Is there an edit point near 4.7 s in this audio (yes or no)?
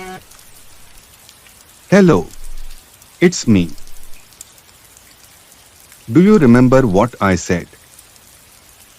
yes